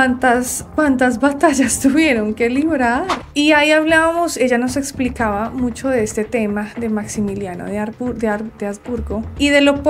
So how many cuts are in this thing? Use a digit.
1